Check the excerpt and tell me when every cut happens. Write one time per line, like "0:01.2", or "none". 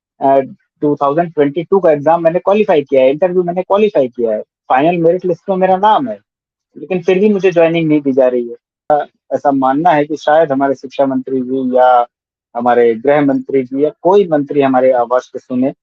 0:08.9